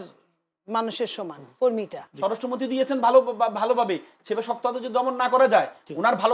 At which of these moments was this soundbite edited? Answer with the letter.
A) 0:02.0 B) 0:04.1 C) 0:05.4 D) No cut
A